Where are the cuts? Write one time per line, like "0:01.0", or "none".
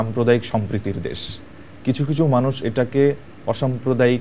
none